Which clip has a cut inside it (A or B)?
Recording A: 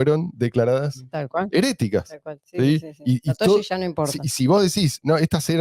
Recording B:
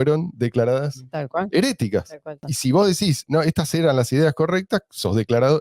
B